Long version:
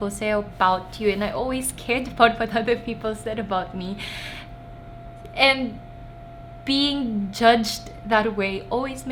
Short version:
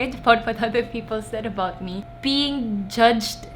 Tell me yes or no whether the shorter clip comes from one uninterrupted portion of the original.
no